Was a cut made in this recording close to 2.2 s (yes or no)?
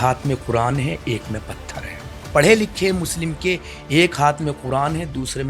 yes